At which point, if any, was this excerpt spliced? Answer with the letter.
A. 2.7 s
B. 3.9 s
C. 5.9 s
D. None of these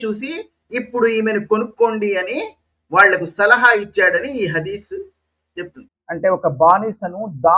C